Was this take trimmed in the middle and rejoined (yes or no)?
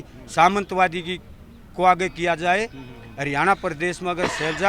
no